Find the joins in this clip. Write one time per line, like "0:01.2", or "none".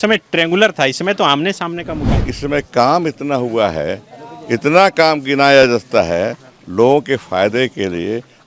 0:02.1